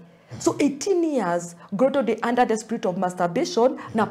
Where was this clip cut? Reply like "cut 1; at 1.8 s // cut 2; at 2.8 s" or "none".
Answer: none